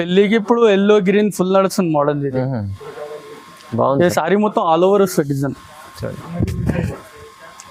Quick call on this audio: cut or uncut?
uncut